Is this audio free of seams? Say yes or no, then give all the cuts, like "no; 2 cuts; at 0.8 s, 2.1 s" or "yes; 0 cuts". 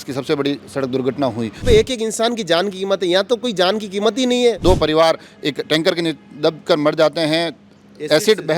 no; 2 cuts; at 1.6 s, 4.6 s